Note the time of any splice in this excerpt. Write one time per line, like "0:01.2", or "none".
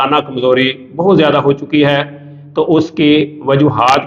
none